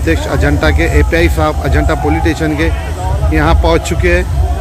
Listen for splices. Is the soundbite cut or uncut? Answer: uncut